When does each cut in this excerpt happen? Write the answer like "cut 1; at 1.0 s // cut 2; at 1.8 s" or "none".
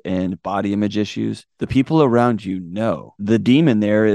cut 1; at 1.5 s // cut 2; at 2.9 s